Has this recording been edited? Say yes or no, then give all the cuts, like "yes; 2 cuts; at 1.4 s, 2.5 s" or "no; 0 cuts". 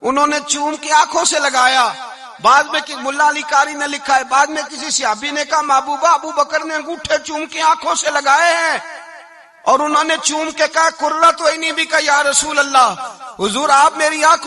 no; 0 cuts